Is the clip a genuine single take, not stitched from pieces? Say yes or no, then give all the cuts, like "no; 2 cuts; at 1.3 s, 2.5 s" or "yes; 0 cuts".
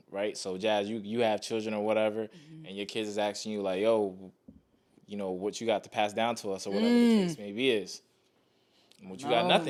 yes; 0 cuts